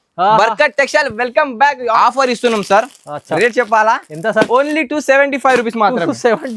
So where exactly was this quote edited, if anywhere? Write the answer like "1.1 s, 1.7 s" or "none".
1.9 s